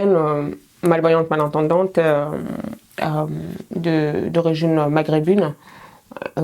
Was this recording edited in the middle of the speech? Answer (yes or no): no